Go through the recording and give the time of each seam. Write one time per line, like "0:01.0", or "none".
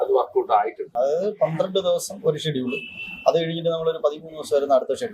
0:00.9